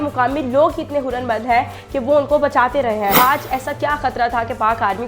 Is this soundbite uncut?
no; 1 cut; at 3.2 s

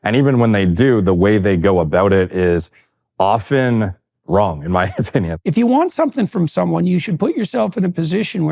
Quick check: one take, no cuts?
no; 1 cut; at 5.3 s

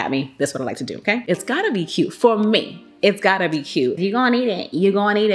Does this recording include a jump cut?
yes; 2 cuts; at 1.2 s, 4.0 s

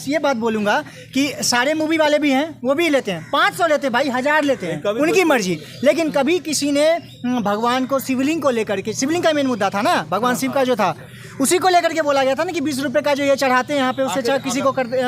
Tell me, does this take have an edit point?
no; 0 cuts

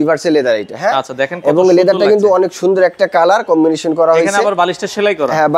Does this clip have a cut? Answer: no; 0 cuts

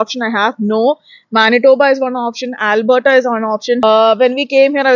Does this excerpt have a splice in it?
yes; 1 cut; at 3.8 s

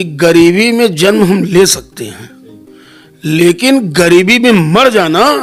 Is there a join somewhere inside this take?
no; 0 cuts

